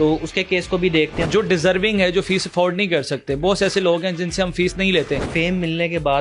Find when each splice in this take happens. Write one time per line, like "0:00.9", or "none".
0:01.3
0:05.3